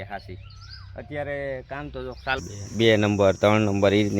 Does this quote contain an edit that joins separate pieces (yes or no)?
yes